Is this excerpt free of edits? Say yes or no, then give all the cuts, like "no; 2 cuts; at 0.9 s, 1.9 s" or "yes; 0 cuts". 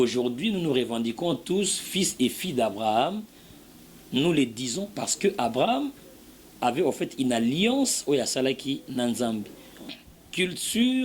no; 1 cut; at 9.8 s